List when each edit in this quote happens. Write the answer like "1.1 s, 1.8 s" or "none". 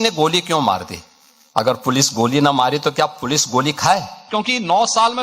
4.2 s